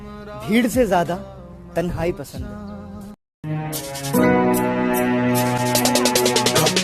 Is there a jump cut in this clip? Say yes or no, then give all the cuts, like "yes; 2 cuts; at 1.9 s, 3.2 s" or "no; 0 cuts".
yes; 1 cut; at 3.4 s